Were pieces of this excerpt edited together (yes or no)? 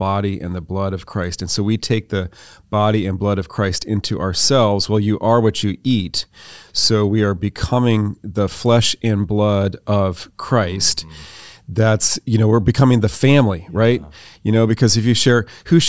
no